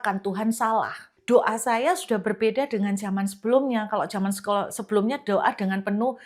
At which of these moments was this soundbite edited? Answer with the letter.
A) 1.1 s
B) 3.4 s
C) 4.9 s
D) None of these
A